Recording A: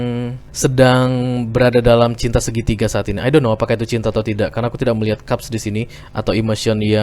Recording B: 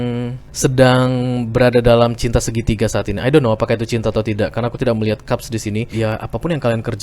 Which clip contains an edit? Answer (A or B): B